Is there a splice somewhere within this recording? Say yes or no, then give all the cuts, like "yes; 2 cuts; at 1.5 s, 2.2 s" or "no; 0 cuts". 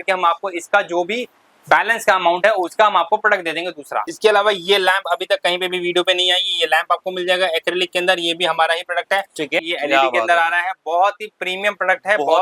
yes; 2 cuts; at 4.1 s, 9.6 s